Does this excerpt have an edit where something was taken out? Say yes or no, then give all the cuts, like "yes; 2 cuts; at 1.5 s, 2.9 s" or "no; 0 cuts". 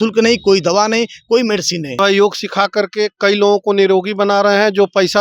yes; 1 cut; at 2.0 s